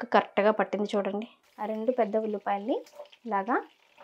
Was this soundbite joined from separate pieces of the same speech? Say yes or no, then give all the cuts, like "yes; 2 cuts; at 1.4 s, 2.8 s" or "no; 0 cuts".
yes; 1 cut; at 1.4 s